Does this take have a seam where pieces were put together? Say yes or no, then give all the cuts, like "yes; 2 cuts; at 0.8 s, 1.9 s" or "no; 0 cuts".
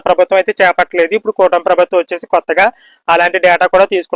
no; 0 cuts